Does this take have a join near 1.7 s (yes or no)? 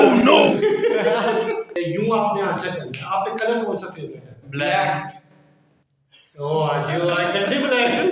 yes